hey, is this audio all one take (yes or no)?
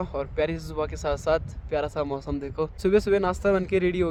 yes